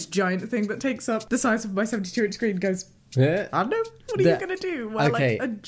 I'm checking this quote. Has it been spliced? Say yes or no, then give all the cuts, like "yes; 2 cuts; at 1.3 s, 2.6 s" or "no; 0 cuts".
yes; 2 cuts; at 1.2 s, 4.0 s